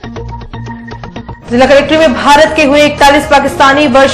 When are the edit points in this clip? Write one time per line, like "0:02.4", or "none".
0:01.1